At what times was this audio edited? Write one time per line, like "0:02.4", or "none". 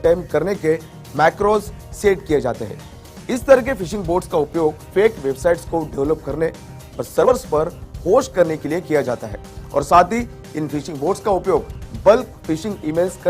0:07.3

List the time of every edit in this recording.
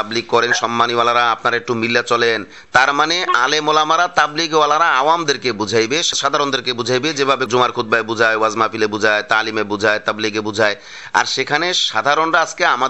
0:06.1
0:07.5

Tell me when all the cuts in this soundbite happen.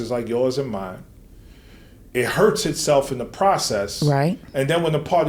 none

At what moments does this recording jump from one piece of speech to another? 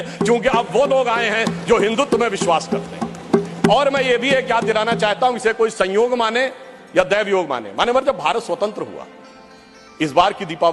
none

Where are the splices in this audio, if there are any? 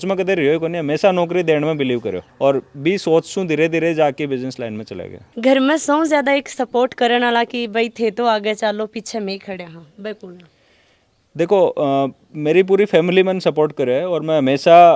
none

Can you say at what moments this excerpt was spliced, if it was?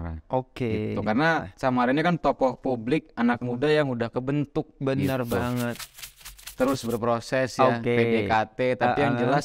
0:06.1

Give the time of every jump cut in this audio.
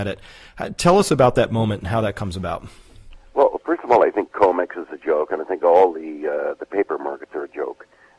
0:04.1

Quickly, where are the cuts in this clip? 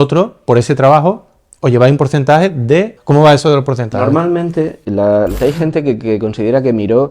0:03.0
0:05.4

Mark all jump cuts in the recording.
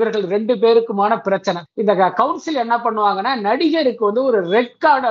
0:01.6

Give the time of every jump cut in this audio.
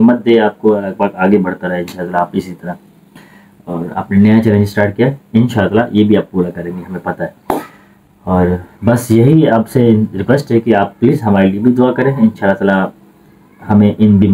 none

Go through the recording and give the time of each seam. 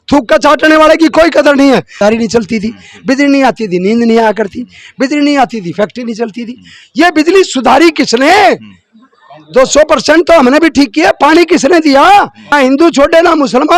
0:01.9
0:12.4

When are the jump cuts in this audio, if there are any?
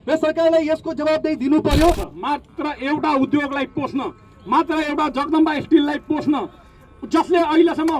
0:02.1

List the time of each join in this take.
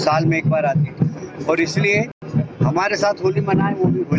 none

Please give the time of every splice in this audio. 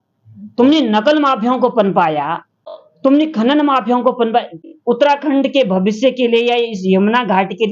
0:02.9
0:04.7

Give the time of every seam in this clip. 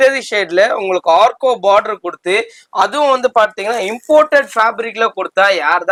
none

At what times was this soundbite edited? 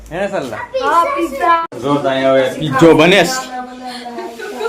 0:01.6

